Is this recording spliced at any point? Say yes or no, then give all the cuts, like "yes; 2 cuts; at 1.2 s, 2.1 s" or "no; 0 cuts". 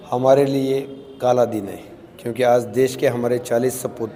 no; 0 cuts